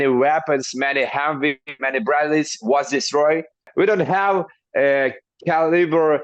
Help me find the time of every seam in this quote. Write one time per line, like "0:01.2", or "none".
0:03.7